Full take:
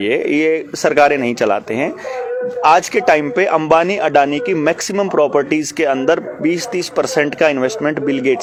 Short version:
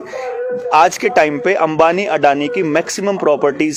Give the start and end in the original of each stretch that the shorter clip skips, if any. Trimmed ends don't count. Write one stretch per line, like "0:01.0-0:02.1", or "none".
none